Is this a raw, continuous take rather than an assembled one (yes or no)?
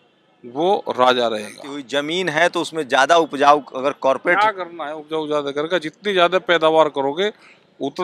no